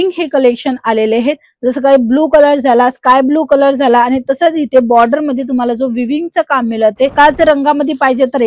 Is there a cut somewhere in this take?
yes; 1 cut; at 7.1 s

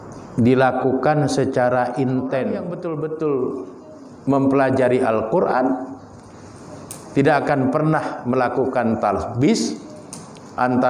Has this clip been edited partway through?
yes; 1 cut; at 2.7 s

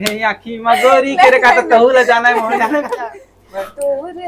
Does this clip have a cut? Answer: yes; 1 cut; at 2.9 s

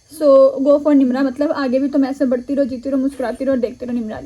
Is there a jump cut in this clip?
no; 0 cuts

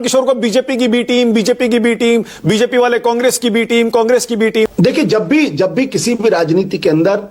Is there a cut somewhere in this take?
yes; 1 cut; at 4.7 s

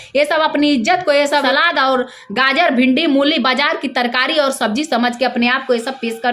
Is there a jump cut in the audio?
yes; 1 cut; at 1.4 s

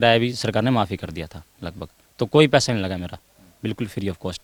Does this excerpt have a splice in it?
no; 0 cuts

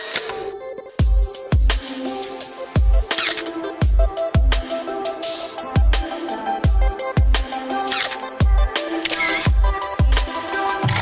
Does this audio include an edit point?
no; 0 cuts

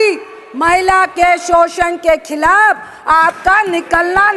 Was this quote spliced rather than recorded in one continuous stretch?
no; 0 cuts

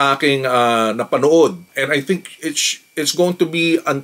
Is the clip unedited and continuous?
yes; 0 cuts

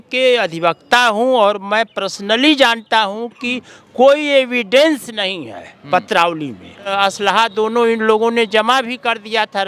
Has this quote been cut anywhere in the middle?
yes; 1 cut; at 6.9 s

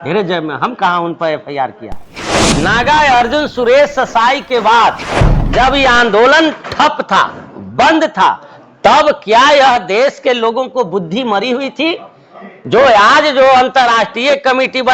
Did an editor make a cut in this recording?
yes; 1 cut; at 2.3 s

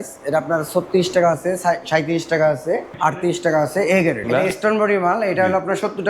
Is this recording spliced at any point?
yes; 2 cuts; at 2.9 s, 4.3 s

